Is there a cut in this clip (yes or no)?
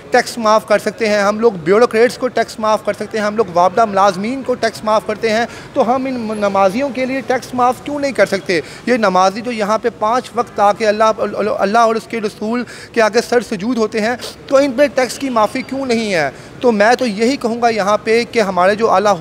no